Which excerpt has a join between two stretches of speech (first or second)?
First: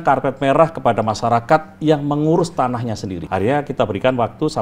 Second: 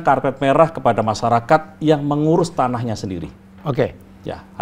first